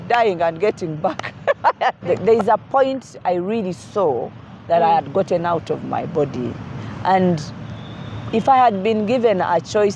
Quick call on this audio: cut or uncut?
cut